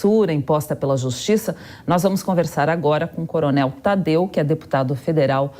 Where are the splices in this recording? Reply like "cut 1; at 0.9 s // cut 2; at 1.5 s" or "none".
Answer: cut 1; at 1.1 s

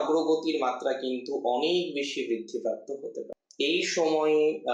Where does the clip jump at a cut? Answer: cut 1; at 3.4 s

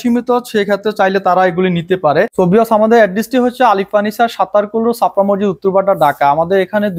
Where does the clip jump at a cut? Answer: cut 1; at 2.3 s

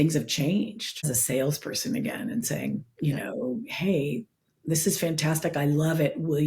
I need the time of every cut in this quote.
cut 1; at 1.1 s

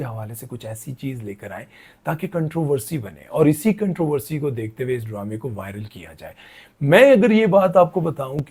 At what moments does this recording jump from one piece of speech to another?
none

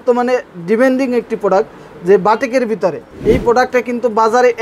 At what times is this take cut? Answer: cut 1; at 3.1 s

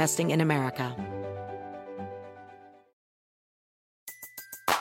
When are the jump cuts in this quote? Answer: cut 1; at 0.9 s

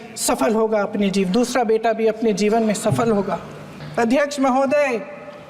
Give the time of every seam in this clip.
cut 1; at 3.8 s

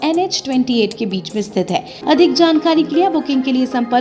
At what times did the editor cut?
cut 1; at 1.9 s

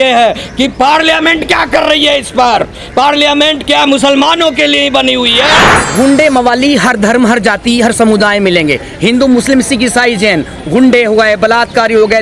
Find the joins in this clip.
cut 1; at 5.8 s

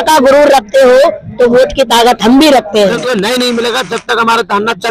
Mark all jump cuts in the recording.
cut 1; at 3.0 s

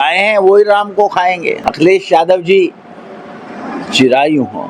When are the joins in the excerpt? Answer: cut 1; at 1.6 s

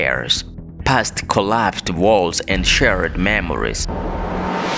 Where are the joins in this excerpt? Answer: cut 1; at 3.9 s

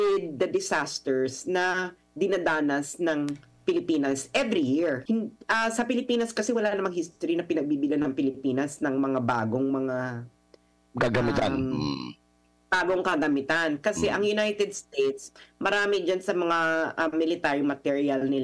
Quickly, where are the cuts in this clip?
cut 1; at 5.0 s

